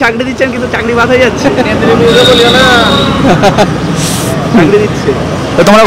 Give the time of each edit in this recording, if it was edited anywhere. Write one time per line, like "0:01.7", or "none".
none